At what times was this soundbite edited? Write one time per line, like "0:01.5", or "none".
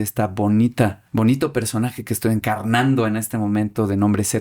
0:01.0
0:02.4